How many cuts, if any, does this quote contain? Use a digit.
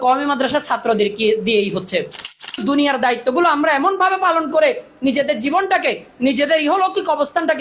1